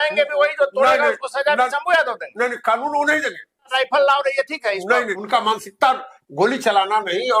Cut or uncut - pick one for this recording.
cut